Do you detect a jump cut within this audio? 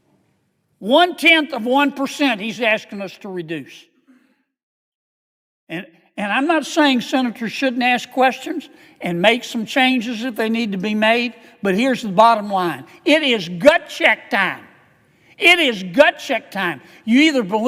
no; 0 cuts

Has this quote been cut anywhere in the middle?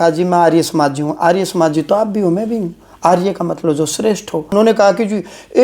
yes; 1 cut; at 4.5 s

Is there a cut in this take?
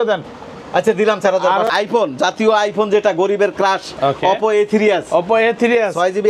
yes; 1 cut; at 1.7 s

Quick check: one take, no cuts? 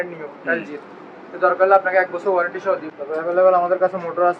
no; 1 cut; at 3.0 s

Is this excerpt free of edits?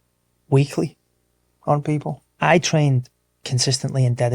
no; 1 cut; at 2.2 s

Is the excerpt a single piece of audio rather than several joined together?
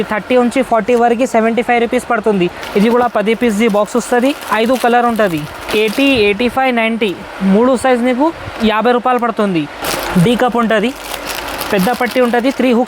no; 3 cuts; at 2.6 s, 5.6 s, 9.8 s

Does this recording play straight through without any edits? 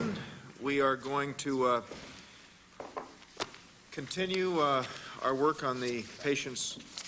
no; 1 cut; at 5.1 s

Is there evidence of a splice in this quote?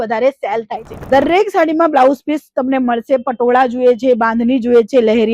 yes; 1 cut; at 0.9 s

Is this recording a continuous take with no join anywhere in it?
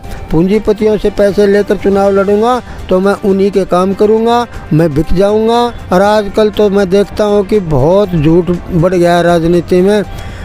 no; 1 cut; at 5.8 s

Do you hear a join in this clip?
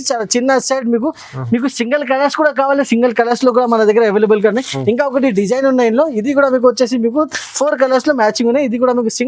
no; 0 cuts

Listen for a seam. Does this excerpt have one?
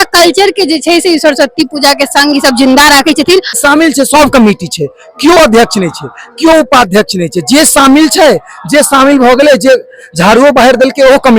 yes; 1 cut; at 3.6 s

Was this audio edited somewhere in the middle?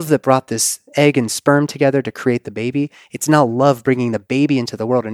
no; 0 cuts

